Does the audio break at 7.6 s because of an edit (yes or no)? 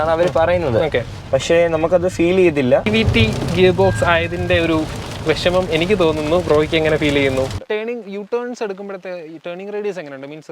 yes